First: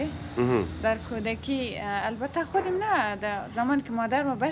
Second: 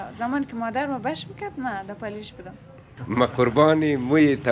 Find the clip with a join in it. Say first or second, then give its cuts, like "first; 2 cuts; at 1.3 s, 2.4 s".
second; 1 cut; at 2.9 s